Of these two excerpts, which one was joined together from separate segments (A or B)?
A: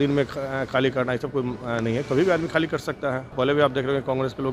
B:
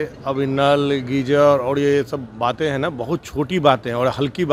A